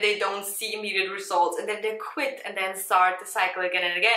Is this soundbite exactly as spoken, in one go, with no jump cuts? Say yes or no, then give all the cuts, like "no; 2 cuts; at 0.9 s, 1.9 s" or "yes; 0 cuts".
yes; 0 cuts